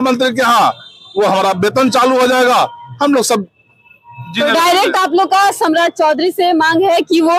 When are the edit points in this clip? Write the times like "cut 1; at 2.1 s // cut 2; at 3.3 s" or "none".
none